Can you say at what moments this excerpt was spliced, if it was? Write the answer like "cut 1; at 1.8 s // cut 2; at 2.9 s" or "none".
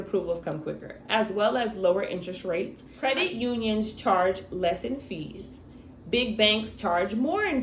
cut 1; at 2.8 s